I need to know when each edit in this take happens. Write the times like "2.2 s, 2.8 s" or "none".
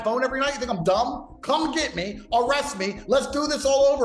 none

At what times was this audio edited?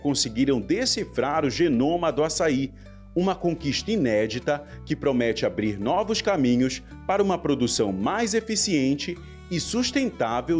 none

